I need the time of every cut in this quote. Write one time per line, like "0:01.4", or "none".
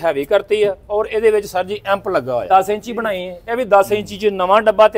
0:02.5